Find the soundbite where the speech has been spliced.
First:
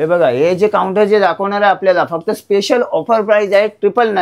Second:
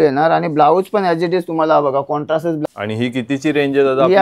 second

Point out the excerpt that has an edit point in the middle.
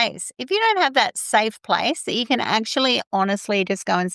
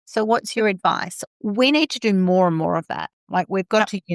second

